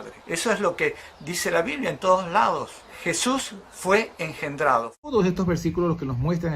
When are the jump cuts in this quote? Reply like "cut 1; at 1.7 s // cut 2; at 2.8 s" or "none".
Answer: cut 1; at 5.1 s

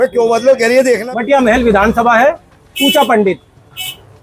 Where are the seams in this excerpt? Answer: cut 1; at 1.1 s

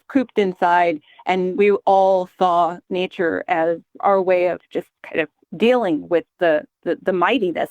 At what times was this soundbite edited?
cut 1; at 4.0 s // cut 2; at 5.4 s

